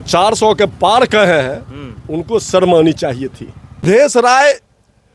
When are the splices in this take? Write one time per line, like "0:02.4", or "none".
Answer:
0:03.9